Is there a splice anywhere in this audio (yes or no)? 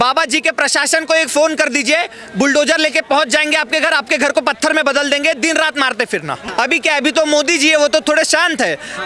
yes